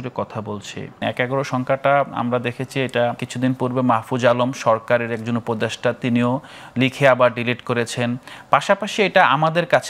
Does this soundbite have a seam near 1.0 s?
yes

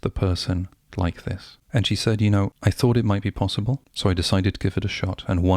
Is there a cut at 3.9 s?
yes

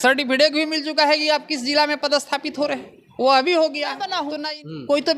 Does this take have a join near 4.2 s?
yes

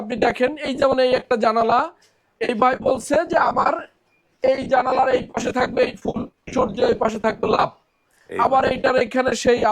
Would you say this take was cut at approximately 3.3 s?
no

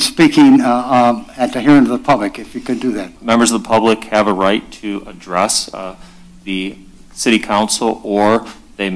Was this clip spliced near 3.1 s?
yes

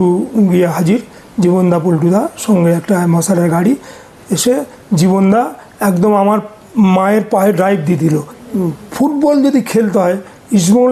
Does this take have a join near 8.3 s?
yes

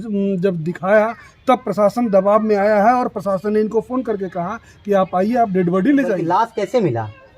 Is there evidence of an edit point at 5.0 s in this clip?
no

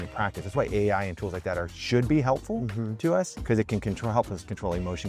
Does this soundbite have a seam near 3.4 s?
yes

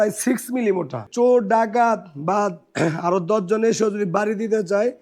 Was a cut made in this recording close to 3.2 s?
no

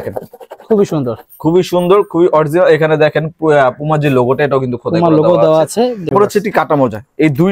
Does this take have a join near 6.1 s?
yes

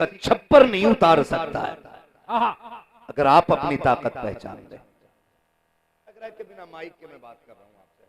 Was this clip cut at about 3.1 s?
no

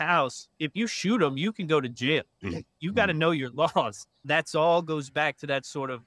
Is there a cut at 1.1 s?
no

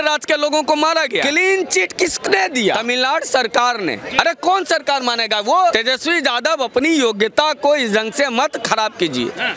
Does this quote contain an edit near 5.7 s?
yes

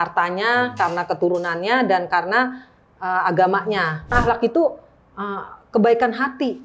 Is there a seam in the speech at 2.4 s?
no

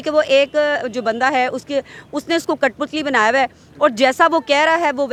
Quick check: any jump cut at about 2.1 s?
no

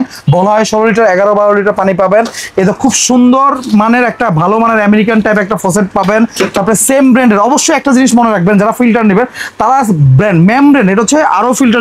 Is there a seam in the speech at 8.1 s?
no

